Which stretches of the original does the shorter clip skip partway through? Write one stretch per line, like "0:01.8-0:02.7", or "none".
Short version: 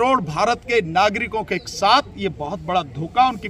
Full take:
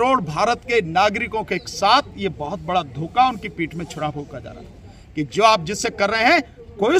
none